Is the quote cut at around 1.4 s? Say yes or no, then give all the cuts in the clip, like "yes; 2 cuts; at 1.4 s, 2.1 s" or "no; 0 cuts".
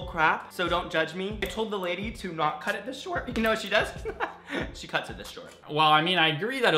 yes; 2 cuts; at 1.4 s, 5.6 s